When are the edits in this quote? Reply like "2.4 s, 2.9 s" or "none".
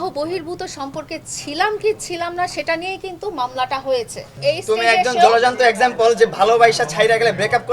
4.3 s